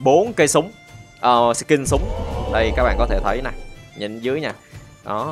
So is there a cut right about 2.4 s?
yes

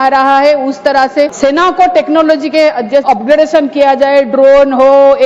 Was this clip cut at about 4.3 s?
no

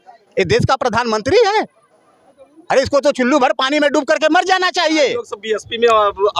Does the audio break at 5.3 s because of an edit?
yes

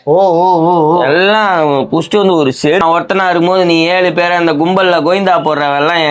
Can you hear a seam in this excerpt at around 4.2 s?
no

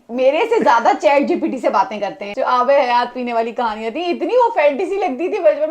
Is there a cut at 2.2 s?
yes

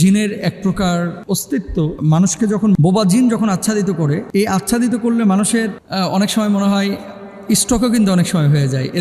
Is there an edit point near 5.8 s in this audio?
yes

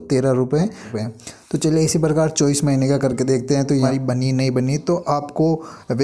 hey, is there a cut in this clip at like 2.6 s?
no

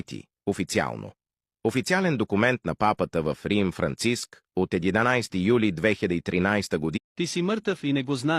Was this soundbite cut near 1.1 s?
no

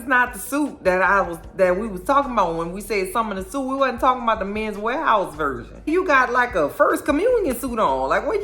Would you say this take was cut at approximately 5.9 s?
yes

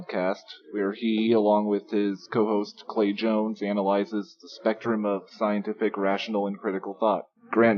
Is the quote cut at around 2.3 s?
yes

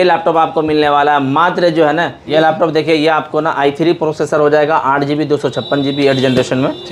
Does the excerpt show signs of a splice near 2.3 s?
yes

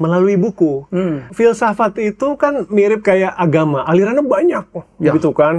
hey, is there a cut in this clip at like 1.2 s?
yes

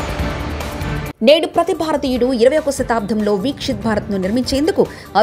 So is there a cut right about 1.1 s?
yes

